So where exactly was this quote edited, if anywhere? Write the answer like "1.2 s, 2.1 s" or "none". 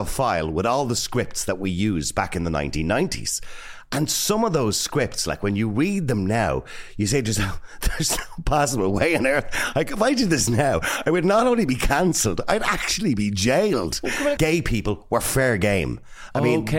14.4 s